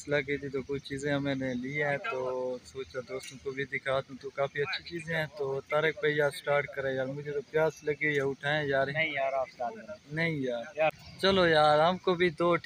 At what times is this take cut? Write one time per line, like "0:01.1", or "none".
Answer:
none